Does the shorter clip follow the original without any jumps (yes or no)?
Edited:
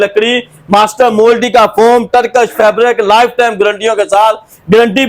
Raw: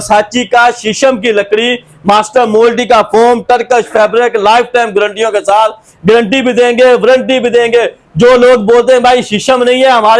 yes